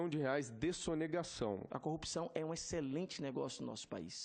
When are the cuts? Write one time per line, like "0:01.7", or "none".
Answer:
0:01.6